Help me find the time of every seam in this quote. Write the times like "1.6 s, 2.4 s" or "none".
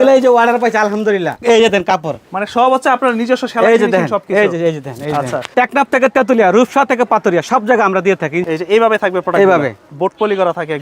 1.4 s, 5.5 s, 8.4 s